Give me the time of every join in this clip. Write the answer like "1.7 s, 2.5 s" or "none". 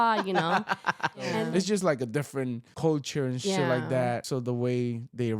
1.4 s, 2.6 s, 4.3 s